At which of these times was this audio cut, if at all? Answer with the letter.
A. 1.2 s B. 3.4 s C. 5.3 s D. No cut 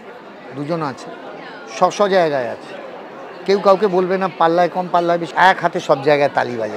C